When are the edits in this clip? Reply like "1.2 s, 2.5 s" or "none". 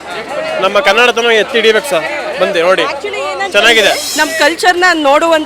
4.1 s